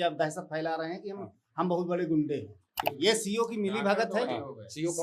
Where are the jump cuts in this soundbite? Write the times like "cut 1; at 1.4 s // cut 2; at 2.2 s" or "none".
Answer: cut 1; at 2.7 s

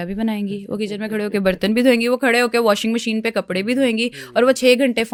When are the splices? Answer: none

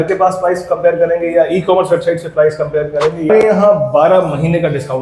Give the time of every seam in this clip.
cut 1; at 3.3 s

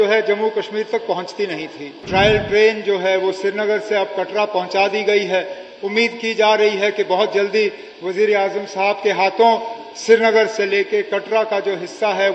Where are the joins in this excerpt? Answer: cut 1; at 2.0 s

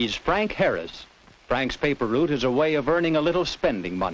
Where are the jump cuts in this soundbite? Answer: cut 1; at 0.9 s

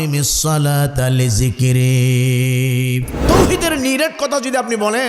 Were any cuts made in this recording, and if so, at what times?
cut 1; at 3.1 s

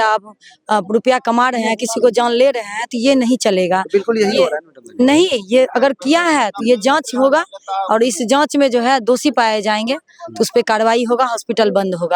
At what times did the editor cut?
none

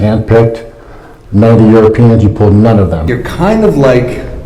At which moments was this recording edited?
cut 1; at 3.2 s

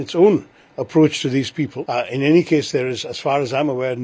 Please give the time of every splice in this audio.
cut 1; at 1.8 s

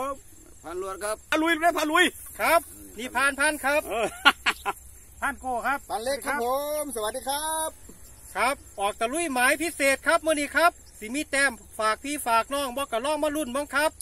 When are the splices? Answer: cut 1; at 1.3 s

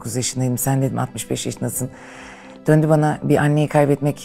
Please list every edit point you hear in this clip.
none

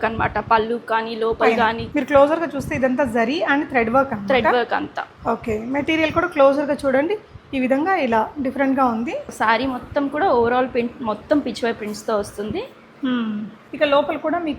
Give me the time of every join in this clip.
cut 1; at 1.8 s // cut 2; at 9.3 s // cut 3; at 13.6 s

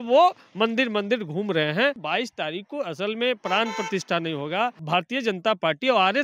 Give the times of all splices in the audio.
cut 1; at 2.0 s // cut 2; at 4.8 s

